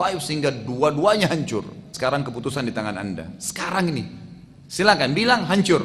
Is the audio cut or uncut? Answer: cut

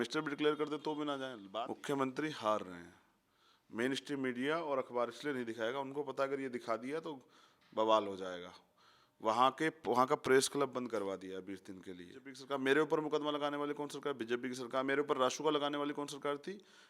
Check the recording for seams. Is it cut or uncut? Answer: cut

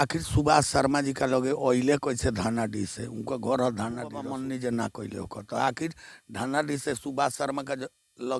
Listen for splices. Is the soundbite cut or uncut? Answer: cut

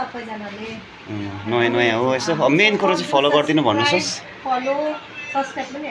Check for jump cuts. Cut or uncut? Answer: uncut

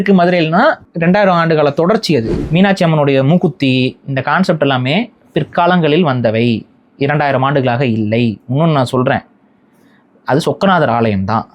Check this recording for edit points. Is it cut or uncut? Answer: cut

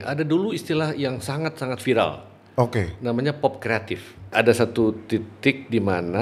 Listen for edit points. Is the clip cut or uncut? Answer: cut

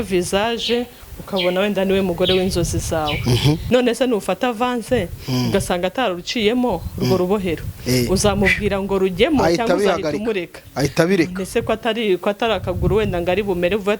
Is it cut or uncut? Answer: cut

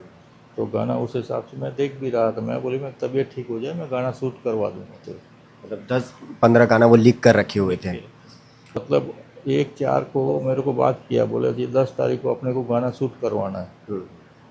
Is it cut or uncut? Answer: cut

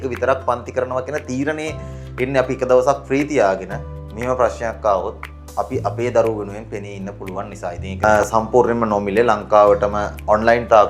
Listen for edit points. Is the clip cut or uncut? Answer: cut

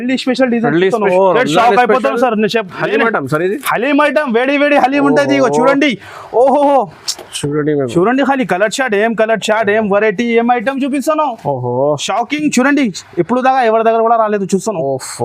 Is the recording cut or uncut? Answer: cut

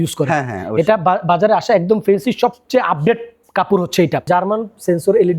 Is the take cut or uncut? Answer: cut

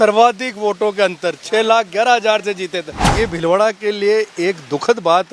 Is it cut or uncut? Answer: cut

